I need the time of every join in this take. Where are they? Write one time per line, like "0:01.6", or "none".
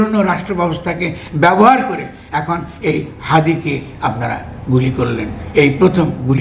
none